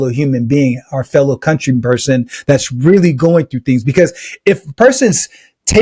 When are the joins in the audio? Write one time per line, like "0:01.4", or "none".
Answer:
none